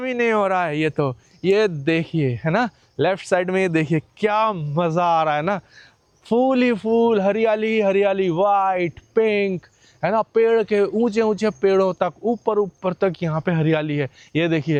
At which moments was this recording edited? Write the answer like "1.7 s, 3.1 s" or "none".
none